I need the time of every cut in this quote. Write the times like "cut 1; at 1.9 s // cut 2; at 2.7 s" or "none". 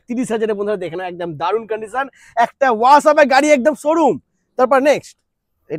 none